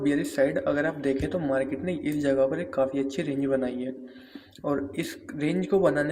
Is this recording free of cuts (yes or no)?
yes